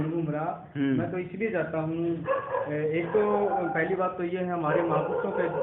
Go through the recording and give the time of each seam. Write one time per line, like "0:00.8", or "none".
none